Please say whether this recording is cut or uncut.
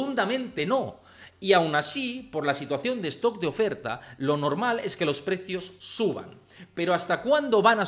uncut